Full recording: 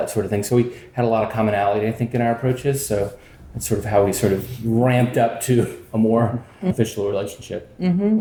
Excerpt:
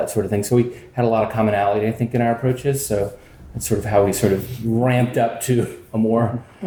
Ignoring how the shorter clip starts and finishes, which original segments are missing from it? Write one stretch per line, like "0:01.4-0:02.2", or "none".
none